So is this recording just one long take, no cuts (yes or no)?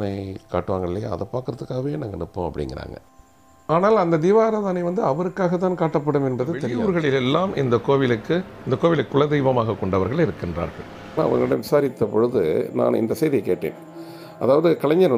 no